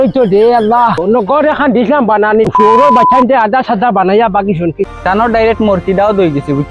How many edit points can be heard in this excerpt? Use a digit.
2